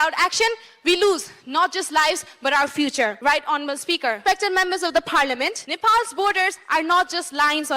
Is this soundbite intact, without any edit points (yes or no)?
no